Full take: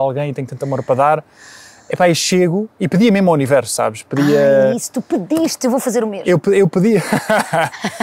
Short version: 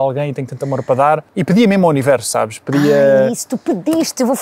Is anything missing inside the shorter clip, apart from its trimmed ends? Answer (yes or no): yes